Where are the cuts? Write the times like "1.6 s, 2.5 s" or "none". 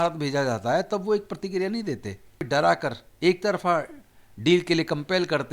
2.4 s